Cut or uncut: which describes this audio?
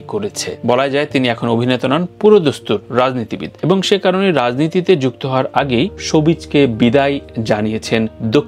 uncut